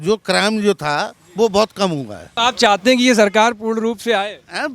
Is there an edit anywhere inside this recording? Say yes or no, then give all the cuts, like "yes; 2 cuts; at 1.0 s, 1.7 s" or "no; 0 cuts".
yes; 1 cut; at 2.2 s